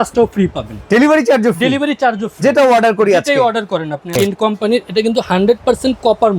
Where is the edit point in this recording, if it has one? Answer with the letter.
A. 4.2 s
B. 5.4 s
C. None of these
A